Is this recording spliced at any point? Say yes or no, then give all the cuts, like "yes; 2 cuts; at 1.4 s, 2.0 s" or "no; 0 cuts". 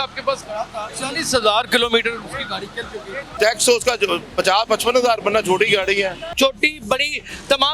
yes; 3 cuts; at 0.9 s, 3.3 s, 6.2 s